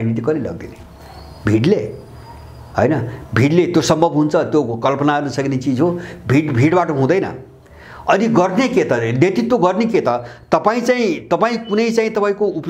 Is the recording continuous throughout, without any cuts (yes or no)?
yes